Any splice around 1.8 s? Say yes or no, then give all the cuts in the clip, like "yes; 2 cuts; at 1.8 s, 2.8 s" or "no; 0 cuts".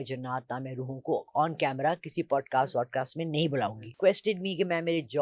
no; 1 cut; at 3.9 s